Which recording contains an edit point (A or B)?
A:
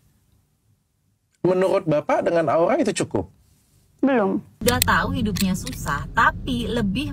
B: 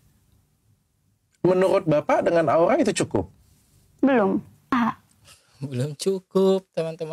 A